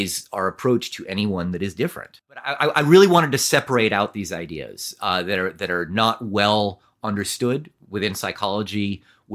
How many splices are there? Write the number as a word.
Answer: one